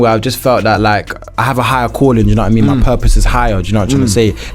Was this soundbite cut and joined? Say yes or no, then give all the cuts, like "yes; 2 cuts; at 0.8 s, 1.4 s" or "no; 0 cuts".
yes; 1 cut; at 1.3 s